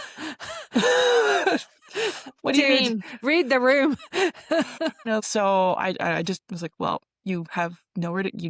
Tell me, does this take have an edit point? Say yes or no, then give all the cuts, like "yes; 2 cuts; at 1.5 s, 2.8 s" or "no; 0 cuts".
yes; 1 cut; at 5.0 s